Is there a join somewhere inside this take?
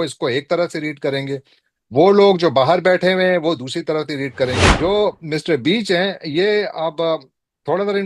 yes; 1 cut; at 4.7 s

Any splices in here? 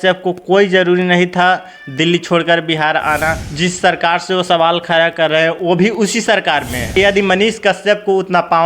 yes; 2 cuts; at 3.4 s, 7.0 s

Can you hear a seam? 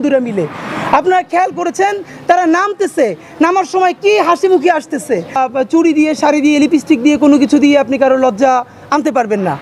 yes; 1 cut; at 5.3 s

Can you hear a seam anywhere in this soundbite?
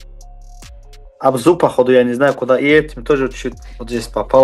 yes; 1 cut; at 1.1 s

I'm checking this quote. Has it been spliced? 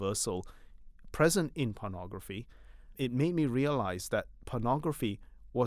yes; 1 cut; at 2.9 s

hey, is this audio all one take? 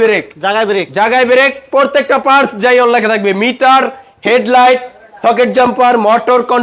yes; 0 cuts

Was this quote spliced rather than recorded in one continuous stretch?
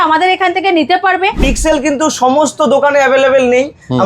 yes; 1 cut; at 1.4 s

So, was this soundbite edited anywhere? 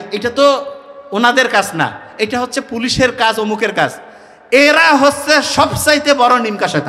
no; 0 cuts

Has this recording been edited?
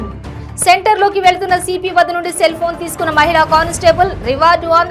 no; 0 cuts

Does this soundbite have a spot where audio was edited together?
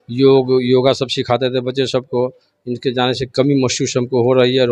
no; 0 cuts

